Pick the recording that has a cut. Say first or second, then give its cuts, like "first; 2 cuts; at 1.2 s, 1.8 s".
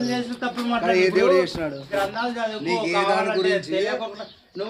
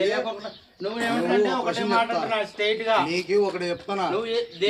first; 1 cut; at 1.8 s